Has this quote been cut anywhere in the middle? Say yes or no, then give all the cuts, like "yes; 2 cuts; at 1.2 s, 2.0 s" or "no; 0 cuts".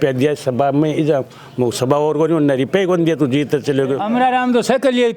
yes; 1 cut; at 4.0 s